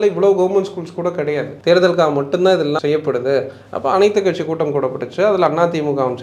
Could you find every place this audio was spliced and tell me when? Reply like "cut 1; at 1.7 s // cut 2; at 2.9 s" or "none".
cut 1; at 1.5 s // cut 2; at 2.8 s